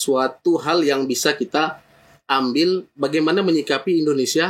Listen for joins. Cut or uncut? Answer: uncut